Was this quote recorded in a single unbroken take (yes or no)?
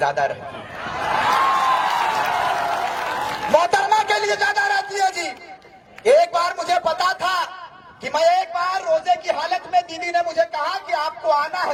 yes